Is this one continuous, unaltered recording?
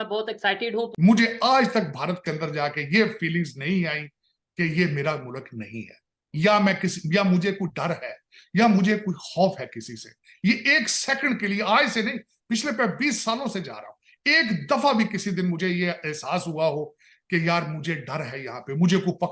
no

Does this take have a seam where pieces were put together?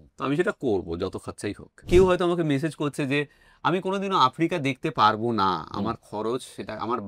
yes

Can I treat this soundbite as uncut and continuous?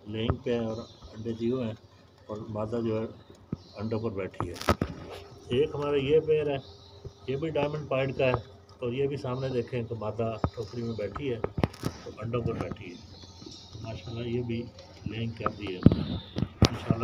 yes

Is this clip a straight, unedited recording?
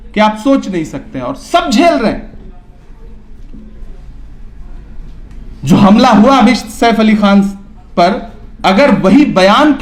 yes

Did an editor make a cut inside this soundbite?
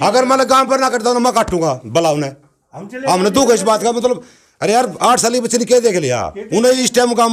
no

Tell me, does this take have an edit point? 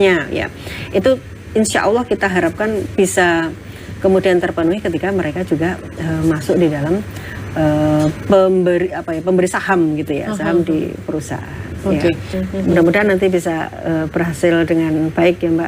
yes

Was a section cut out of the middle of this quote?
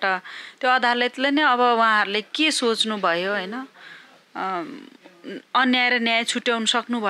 no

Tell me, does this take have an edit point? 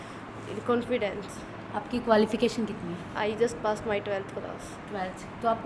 no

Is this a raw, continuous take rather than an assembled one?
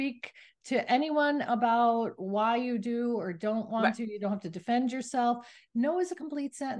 yes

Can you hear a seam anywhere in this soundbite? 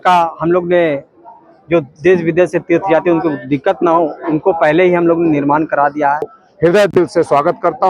yes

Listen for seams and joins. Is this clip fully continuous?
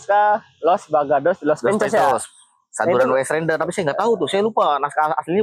yes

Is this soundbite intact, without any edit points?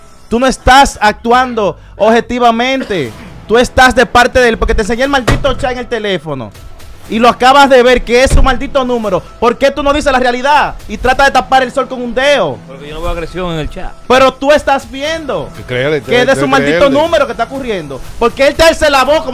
yes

